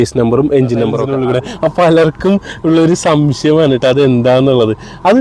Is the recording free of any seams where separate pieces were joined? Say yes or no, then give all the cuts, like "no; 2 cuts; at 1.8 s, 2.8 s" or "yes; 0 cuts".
no; 1 cut; at 1.0 s